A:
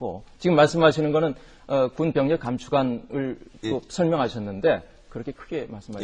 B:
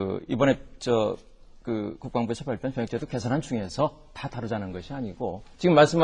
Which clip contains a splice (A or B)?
B